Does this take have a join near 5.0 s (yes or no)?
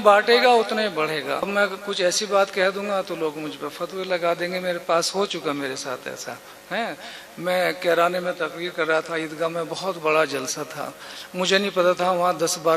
no